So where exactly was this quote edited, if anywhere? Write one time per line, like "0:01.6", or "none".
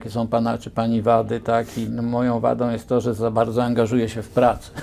none